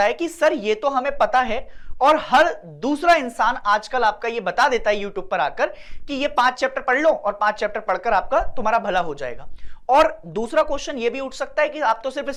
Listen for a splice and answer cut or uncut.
uncut